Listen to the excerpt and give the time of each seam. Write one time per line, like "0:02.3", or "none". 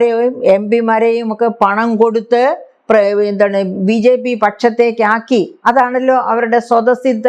none